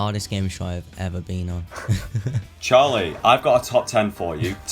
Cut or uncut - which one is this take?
cut